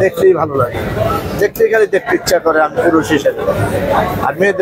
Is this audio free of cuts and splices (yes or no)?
yes